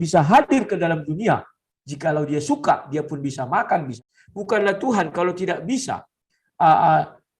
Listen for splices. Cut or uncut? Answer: cut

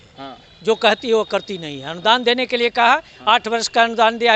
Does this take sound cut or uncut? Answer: uncut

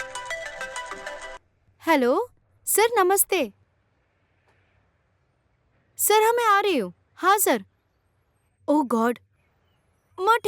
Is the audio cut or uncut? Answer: cut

